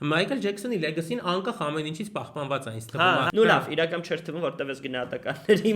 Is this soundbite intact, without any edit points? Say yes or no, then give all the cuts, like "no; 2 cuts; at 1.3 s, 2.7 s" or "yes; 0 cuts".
no; 1 cut; at 3.3 s